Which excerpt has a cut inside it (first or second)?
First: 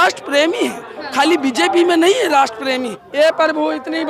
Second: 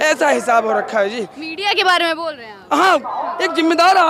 first